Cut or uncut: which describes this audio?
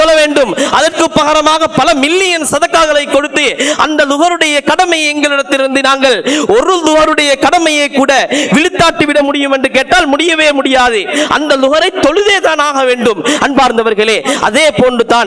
uncut